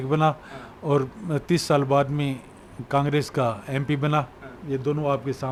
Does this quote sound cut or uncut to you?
uncut